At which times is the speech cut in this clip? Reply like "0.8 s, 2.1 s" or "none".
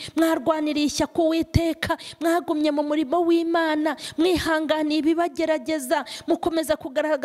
none